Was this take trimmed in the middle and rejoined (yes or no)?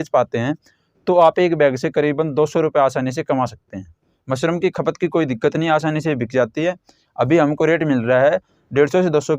yes